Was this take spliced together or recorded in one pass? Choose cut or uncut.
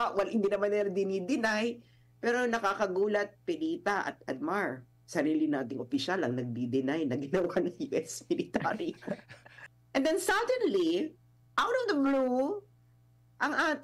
cut